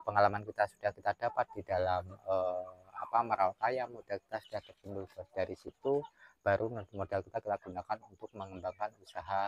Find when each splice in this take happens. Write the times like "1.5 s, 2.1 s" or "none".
none